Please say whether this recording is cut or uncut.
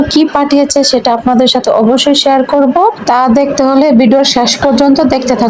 uncut